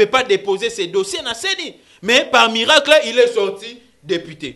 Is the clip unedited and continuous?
yes; 0 cuts

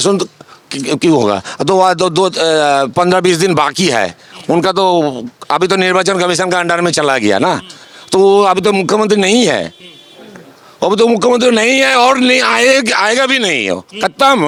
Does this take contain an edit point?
no; 0 cuts

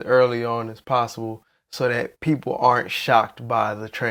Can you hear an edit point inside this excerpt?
no; 0 cuts

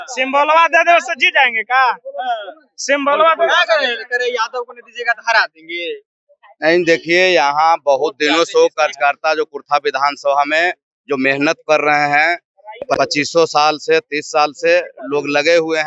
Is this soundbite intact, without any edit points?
yes; 0 cuts

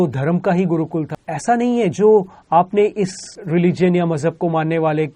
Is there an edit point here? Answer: yes; 2 cuts; at 1.2 s, 3.4 s

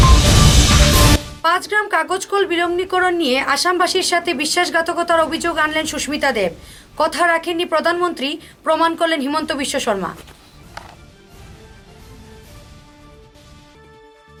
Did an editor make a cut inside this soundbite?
no; 0 cuts

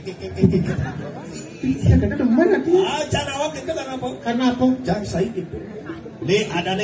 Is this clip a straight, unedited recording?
no; 1 cut; at 5.4 s

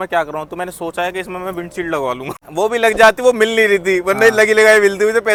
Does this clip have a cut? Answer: no; 0 cuts

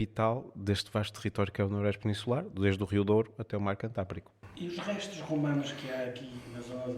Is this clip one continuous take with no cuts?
yes; 0 cuts

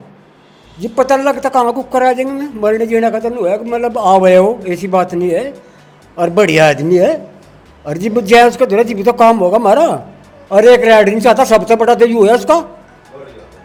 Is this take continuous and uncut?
yes; 0 cuts

